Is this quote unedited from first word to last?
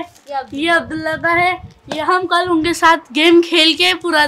yes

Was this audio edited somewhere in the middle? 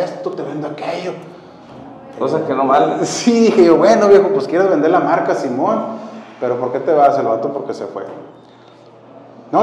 no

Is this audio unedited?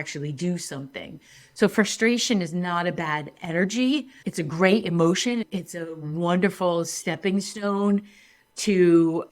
no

